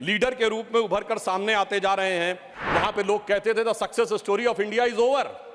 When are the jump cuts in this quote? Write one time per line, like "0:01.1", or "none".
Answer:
0:02.5